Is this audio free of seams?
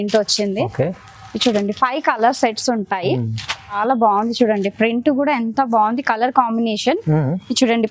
no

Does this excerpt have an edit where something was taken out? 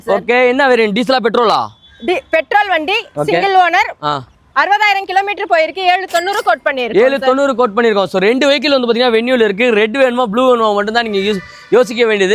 no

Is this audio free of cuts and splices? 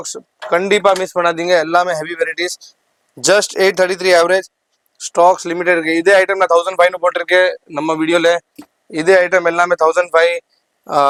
yes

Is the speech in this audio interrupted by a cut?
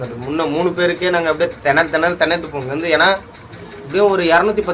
no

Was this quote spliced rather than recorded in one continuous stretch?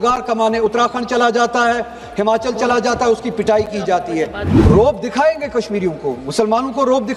yes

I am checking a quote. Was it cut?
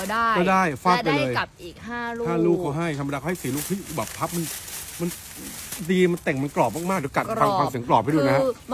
no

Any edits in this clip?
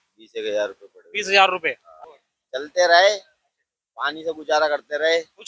yes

